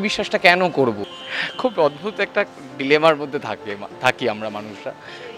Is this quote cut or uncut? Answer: cut